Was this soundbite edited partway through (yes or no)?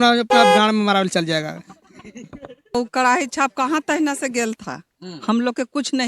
yes